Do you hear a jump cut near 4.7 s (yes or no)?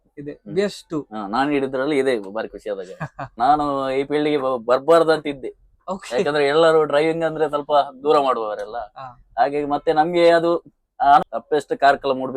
no